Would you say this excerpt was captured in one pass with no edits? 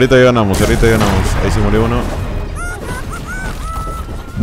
yes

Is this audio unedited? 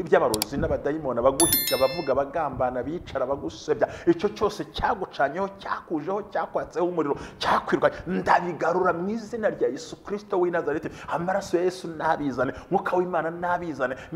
yes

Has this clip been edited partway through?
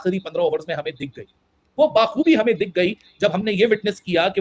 no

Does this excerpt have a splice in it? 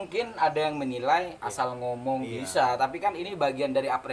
no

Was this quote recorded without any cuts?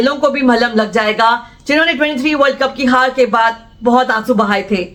yes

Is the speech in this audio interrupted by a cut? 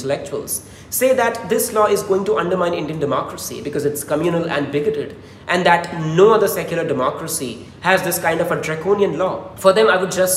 yes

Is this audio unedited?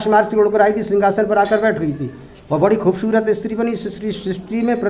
yes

